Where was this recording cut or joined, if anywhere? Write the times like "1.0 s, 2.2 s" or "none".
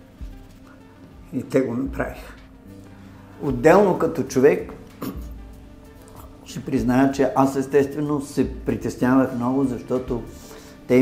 none